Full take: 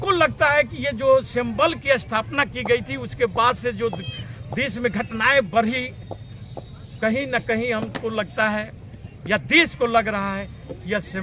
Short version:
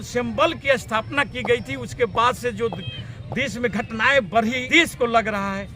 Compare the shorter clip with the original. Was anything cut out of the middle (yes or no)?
yes